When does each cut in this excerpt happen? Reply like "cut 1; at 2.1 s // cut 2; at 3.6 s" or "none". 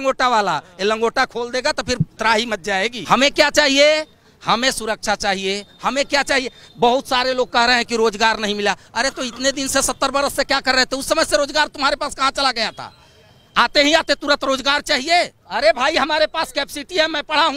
cut 1; at 3.0 s // cut 2; at 15.4 s

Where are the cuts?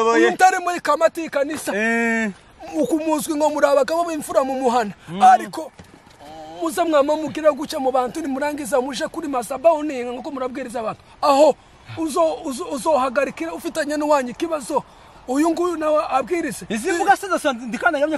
none

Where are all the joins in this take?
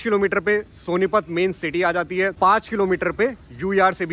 cut 1; at 2.3 s

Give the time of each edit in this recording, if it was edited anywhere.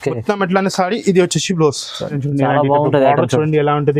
cut 1; at 2.2 s

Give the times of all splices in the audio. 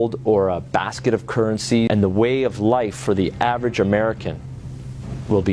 cut 1; at 1.9 s

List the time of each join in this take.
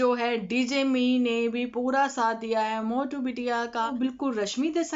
cut 1; at 3.9 s

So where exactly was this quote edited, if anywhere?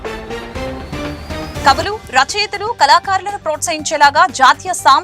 none

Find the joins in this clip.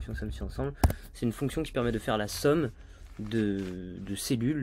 none

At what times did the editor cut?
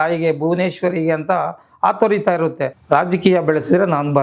cut 1; at 2.8 s

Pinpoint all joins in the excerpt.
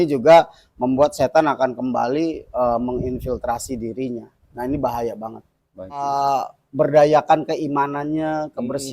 cut 1; at 6.1 s

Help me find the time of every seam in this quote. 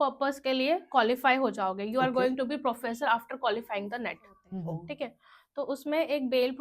cut 1; at 4.5 s

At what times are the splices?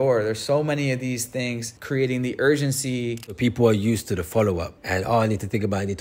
cut 1; at 1.7 s // cut 2; at 3.4 s // cut 3; at 4.8 s

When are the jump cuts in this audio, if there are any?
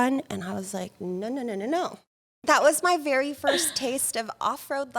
cut 1; at 2.3 s

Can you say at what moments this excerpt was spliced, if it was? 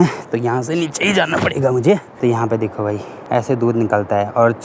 cut 1; at 2.1 s // cut 2; at 3.1 s

